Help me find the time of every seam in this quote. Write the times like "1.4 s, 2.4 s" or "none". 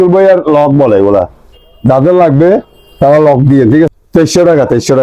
3.9 s